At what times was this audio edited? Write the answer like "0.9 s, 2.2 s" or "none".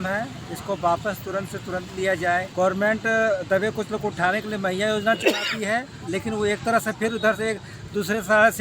2.5 s, 6.0 s